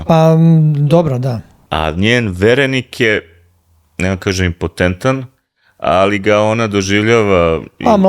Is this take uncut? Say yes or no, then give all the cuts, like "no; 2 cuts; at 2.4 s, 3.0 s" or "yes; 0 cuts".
no; 1 cut; at 1.6 s